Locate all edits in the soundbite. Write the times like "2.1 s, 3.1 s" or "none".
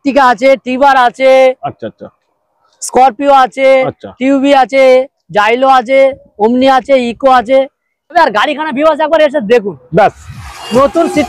8.1 s